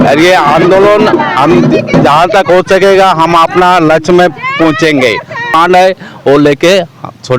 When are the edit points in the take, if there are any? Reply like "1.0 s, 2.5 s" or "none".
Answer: 5.6 s